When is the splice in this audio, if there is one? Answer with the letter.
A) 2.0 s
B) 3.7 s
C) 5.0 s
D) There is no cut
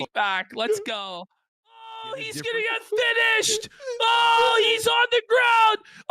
A